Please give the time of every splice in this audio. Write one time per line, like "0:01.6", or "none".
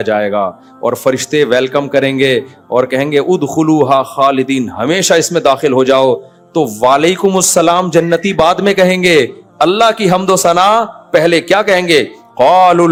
none